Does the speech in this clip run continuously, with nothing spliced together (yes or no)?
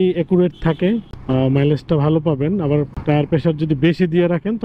no